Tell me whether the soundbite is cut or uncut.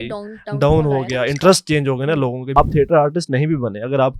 cut